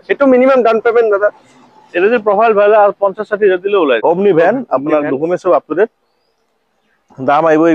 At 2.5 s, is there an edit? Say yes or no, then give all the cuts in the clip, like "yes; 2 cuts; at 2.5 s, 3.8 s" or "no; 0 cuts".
no; 1 cut; at 4.0 s